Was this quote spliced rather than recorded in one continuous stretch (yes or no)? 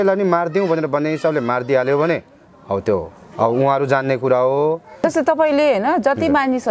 yes